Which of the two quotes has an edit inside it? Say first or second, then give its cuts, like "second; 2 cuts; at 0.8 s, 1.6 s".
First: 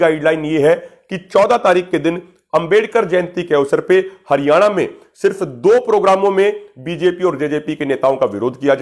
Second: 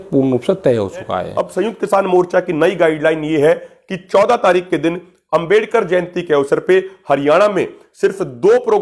second; 1 cut; at 1.5 s